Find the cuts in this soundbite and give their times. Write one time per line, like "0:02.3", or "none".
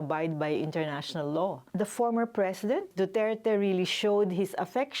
0:01.6
0:02.9

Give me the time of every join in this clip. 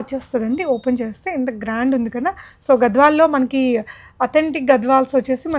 none

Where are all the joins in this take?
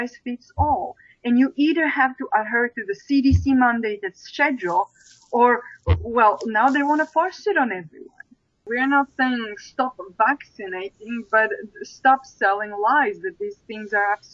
0:08.6

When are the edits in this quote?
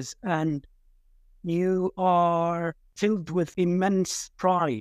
0:02.8
0:03.5

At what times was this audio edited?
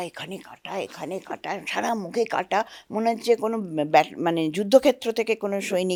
none

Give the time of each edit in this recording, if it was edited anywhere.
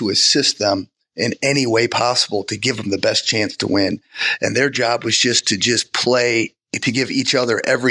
none

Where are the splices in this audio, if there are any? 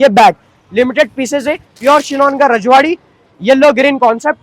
0:01.7

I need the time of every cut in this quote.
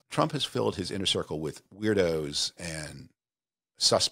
0:01.7

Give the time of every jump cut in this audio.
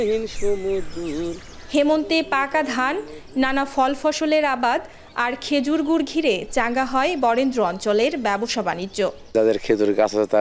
none

